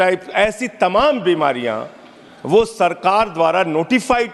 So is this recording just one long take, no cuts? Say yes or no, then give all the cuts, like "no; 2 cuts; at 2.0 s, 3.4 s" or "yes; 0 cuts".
yes; 0 cuts